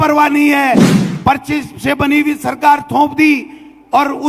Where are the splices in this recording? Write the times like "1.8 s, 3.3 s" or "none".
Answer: 1.0 s